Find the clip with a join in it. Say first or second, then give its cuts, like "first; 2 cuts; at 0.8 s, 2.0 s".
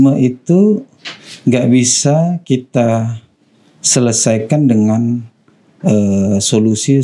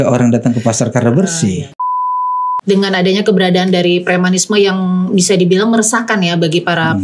second; 1 cut; at 2.2 s